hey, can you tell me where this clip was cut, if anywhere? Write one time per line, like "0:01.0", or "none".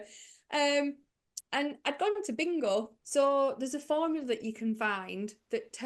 0:03.0

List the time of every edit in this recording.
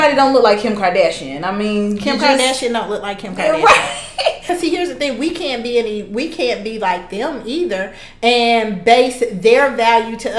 0:04.4

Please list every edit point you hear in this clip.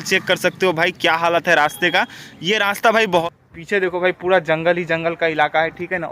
0:03.2

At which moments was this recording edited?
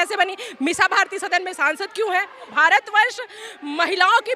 0:02.5

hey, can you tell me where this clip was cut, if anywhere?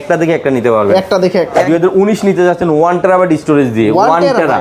0:01.6

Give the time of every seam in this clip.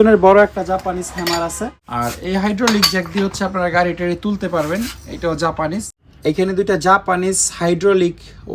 0:01.8
0:06.0

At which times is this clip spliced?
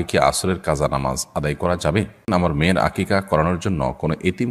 0:02.3

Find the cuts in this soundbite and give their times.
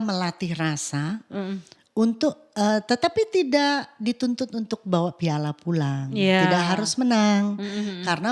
none

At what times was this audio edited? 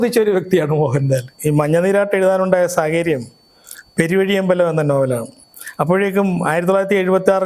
0:01.3

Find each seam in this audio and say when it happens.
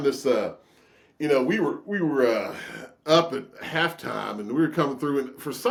none

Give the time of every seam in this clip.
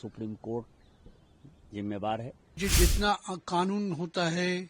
0:02.6

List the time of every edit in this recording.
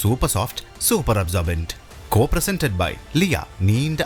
none

